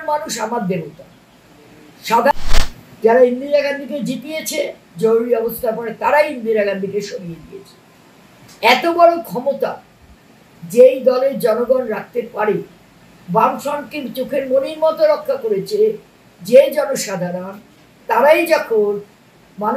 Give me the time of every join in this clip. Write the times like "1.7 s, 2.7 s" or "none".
2.3 s